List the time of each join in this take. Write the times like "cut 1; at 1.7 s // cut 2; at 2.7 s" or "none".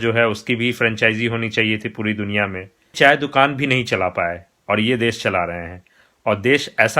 cut 1; at 2.9 s